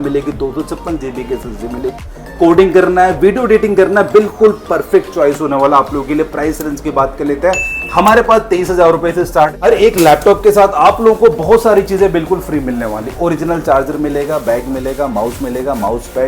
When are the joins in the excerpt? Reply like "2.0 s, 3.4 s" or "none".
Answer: 1.9 s, 9.5 s